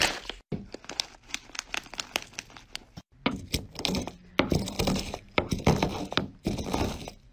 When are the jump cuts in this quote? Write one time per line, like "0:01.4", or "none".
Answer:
none